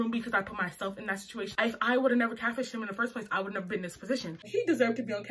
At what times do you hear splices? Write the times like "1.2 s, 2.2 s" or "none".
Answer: 1.5 s, 4.4 s